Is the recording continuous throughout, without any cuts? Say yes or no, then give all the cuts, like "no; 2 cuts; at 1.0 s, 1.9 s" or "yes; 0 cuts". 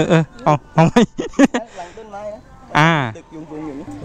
yes; 0 cuts